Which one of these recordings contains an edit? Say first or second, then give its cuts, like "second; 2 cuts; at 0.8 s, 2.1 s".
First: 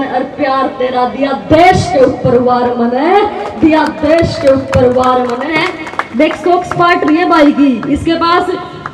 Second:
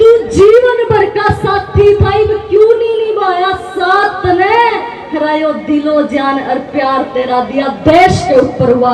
first; 1 cut; at 5.5 s